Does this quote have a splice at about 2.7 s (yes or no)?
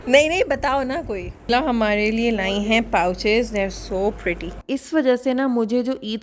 no